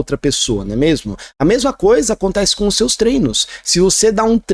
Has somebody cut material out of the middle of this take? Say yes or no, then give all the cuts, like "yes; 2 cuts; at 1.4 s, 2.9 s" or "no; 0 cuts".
no; 0 cuts